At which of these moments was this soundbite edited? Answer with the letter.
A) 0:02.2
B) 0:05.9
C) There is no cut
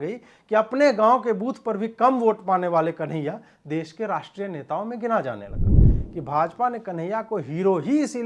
B